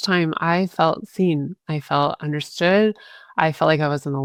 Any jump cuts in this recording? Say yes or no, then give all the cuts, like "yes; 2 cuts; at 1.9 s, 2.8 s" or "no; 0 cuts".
no; 0 cuts